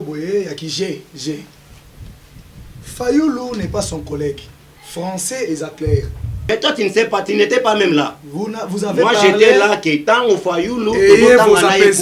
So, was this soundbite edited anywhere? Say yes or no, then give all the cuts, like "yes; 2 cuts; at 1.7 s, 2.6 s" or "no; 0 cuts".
yes; 1 cut; at 6.4 s